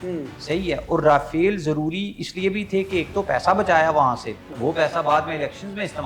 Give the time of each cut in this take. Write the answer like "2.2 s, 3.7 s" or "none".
4.5 s